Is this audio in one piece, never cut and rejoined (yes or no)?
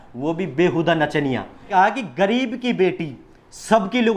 no